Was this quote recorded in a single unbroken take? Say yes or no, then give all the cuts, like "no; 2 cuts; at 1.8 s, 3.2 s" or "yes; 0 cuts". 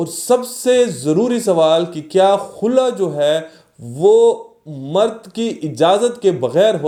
yes; 0 cuts